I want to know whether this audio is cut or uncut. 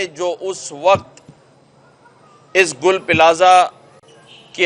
uncut